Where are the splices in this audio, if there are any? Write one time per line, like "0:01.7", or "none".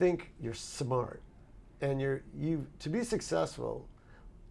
none